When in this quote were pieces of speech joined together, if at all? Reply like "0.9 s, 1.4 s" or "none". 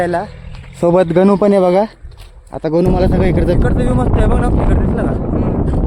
3.6 s